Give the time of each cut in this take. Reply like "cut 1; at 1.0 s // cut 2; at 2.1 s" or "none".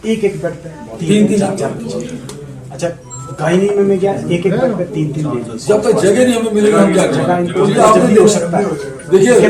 none